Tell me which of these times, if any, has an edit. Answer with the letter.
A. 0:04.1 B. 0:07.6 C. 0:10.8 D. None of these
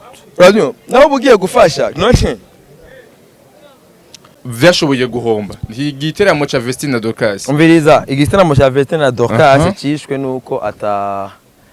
A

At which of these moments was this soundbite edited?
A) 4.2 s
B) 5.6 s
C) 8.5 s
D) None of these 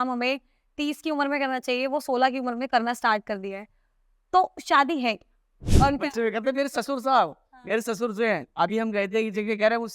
B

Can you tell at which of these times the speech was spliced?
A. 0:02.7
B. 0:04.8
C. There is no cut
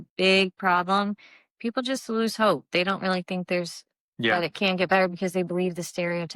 C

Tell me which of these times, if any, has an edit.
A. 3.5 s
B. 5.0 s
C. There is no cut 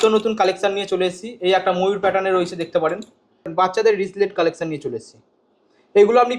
A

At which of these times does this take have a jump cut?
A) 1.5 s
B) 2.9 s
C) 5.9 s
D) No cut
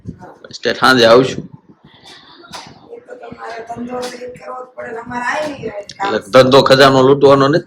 D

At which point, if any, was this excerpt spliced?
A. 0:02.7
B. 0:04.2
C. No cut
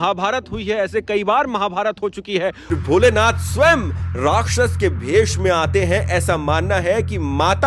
A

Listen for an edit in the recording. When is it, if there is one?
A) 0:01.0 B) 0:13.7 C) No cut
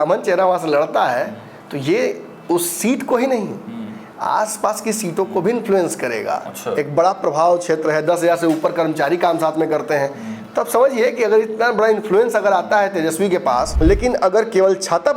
B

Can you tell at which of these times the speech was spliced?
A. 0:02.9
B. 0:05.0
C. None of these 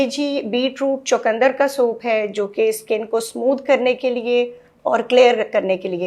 C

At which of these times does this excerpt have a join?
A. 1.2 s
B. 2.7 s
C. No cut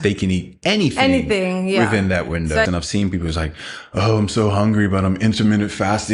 B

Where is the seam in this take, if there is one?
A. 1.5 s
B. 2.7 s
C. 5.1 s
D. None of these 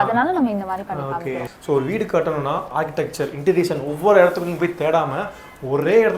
A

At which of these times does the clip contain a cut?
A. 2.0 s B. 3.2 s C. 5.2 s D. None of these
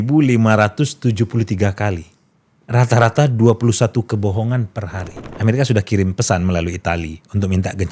C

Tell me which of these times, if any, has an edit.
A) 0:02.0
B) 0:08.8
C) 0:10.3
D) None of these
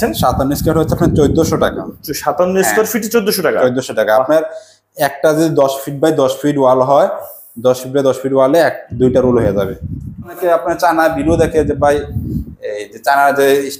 C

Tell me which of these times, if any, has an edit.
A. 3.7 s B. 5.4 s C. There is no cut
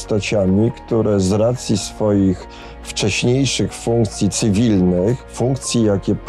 B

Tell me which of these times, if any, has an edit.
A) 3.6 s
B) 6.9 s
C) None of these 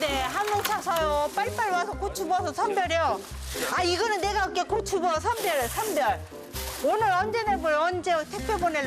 C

